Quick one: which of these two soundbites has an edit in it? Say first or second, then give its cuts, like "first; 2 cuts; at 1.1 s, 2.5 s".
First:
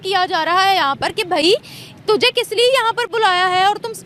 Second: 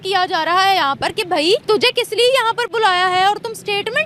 second; 1 cut; at 1.4 s